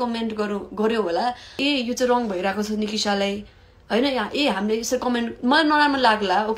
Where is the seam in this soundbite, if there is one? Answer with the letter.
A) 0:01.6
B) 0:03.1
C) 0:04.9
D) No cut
A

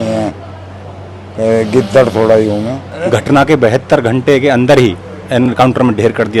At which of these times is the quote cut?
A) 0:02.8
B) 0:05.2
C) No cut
A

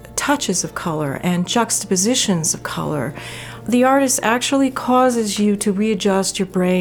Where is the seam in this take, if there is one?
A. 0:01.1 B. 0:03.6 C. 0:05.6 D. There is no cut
B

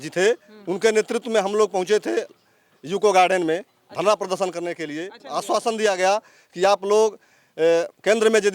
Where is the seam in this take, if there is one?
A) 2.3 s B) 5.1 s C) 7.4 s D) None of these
B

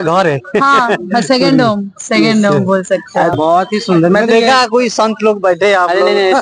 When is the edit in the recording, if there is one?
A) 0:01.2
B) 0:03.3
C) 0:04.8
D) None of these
B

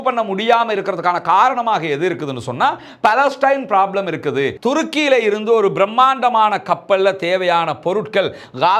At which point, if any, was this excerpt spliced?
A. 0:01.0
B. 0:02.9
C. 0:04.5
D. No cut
C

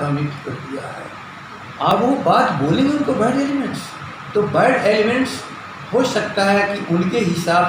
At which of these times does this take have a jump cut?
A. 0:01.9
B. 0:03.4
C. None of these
A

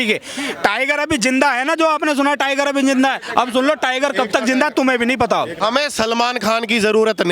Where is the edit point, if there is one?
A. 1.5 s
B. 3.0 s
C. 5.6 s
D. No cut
C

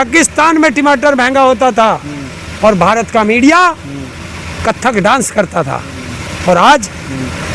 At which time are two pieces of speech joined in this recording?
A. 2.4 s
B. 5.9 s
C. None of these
C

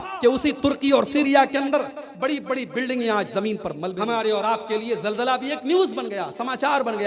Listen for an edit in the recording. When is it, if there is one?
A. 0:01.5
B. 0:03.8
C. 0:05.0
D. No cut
B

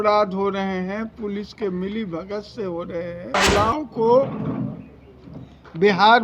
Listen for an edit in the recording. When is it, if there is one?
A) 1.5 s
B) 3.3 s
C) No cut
B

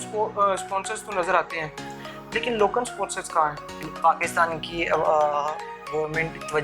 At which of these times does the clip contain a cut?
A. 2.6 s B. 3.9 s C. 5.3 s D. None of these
B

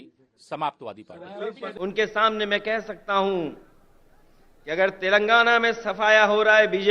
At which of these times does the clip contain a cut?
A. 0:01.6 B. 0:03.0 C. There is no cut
A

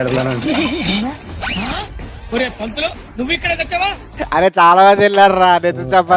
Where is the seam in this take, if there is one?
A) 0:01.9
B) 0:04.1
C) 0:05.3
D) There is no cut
B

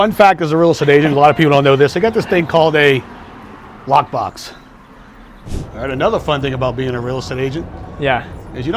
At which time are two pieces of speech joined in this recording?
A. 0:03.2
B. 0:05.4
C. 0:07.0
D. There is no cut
B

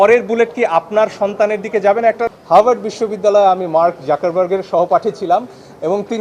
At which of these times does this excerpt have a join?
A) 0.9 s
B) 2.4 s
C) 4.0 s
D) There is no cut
B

